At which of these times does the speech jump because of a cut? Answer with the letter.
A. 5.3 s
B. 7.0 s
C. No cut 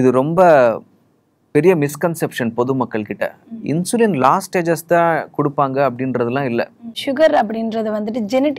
B